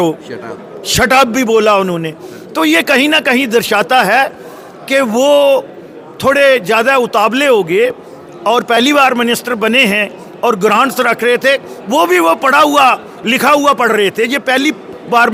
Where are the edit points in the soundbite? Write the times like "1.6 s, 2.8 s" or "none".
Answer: none

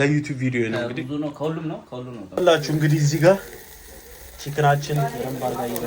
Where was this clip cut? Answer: 2.3 s

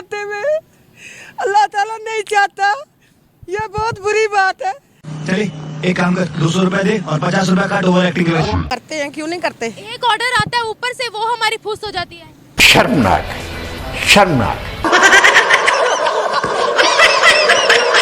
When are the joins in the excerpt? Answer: 8.7 s

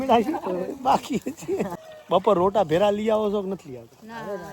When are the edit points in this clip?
1.9 s

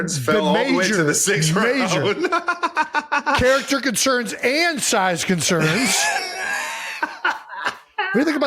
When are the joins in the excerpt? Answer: none

